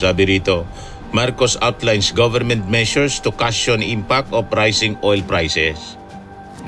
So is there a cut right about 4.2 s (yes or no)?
no